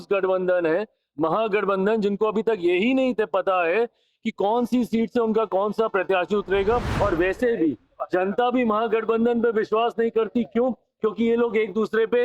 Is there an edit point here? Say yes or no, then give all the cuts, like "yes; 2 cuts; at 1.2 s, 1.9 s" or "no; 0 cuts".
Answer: yes; 1 cut; at 6.9 s